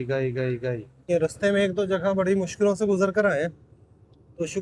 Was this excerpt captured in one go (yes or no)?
no